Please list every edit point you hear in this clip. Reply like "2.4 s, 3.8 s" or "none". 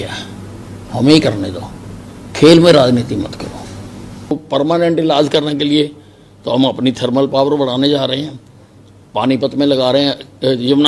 4.3 s